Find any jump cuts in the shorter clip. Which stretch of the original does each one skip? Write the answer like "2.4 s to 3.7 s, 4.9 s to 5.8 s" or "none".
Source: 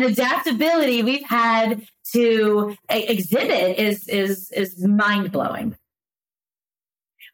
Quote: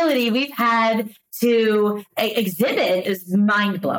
3.7 s to 4.5 s

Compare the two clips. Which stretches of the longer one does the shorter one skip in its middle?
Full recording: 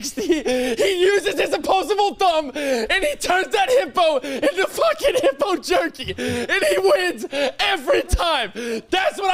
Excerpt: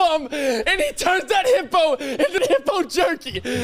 4.6 s to 5.1 s

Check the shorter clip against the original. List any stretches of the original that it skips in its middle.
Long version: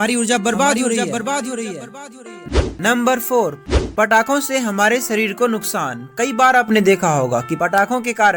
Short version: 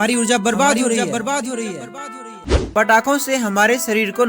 2.6 s to 3.8 s

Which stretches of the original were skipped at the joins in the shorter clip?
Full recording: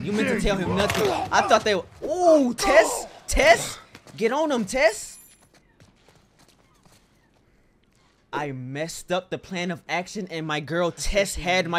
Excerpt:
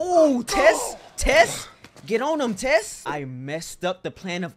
5.0 s to 8.2 s

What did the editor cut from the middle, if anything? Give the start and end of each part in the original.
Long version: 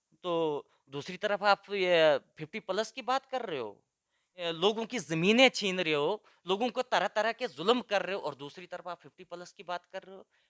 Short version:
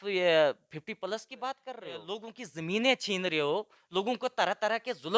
3.6 s to 4.5 s

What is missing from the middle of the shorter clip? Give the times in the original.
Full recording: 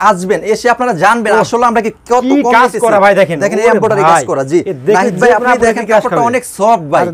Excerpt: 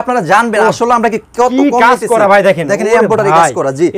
none

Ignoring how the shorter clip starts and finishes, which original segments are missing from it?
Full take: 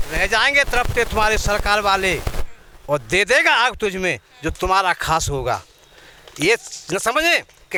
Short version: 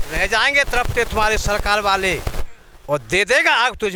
none

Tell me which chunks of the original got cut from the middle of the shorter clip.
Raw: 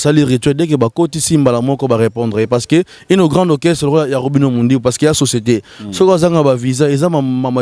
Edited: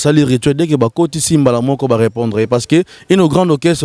none

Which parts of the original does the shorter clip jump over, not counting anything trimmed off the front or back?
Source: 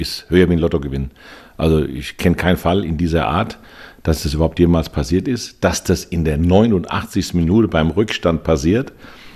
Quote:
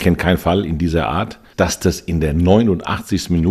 3.6 s to 5.5 s

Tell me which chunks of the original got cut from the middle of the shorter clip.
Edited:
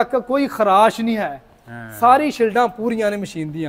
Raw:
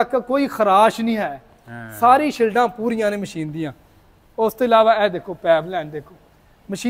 none

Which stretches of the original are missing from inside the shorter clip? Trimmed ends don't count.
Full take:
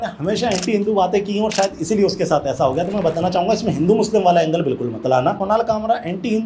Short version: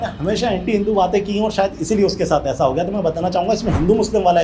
none

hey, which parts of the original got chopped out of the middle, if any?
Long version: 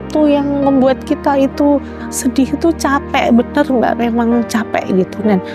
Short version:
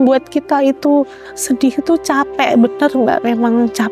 none

